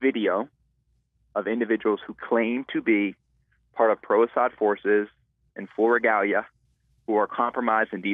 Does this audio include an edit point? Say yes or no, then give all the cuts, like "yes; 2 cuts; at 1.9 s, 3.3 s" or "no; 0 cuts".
no; 0 cuts